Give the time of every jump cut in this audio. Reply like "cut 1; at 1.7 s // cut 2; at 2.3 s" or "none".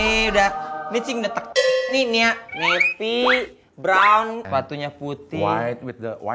cut 1; at 1.9 s // cut 2; at 4.4 s